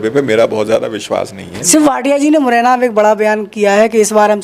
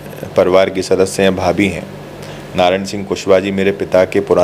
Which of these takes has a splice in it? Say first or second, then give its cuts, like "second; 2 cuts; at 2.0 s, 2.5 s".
first; 1 cut; at 1.7 s